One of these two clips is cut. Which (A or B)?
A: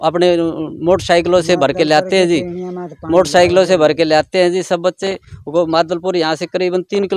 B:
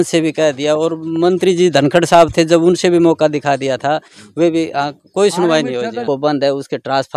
B